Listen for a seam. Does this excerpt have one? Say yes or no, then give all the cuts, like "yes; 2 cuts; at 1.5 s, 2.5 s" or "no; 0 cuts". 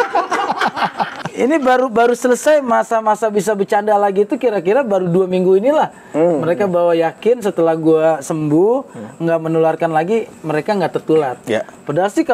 yes; 1 cut; at 1.2 s